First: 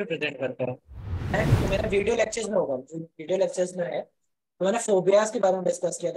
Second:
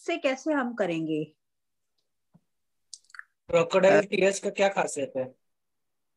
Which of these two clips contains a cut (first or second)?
first